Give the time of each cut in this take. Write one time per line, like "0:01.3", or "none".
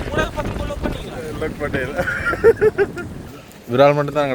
0:03.3